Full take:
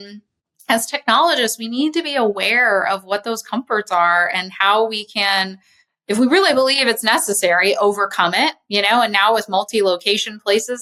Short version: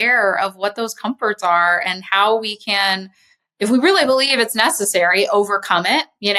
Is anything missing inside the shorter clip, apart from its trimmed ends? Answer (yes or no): no